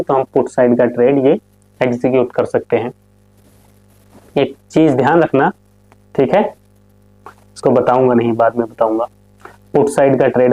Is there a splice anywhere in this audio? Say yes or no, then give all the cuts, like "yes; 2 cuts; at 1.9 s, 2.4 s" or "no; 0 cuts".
no; 0 cuts